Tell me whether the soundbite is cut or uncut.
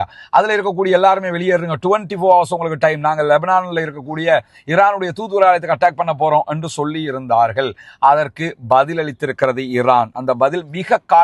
uncut